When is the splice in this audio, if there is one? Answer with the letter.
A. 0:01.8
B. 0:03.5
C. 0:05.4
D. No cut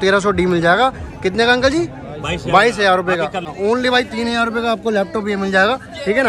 B